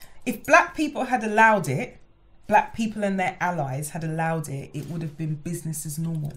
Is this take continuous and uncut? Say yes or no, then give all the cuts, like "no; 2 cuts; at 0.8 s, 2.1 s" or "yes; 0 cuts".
yes; 0 cuts